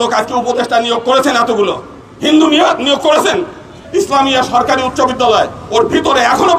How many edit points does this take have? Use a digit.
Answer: 1